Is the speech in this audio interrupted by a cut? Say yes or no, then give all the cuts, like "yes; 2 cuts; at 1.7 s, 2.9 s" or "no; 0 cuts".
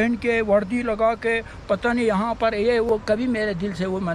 yes; 1 cut; at 2.9 s